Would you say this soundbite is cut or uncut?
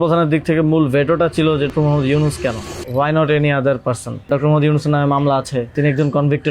cut